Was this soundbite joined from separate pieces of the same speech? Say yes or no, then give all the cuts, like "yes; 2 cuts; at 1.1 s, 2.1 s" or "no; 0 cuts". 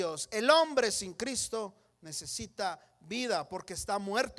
no; 0 cuts